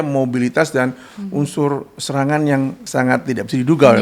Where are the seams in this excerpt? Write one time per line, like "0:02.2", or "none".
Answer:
0:02.8